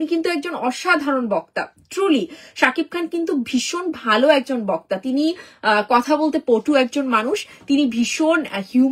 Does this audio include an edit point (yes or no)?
yes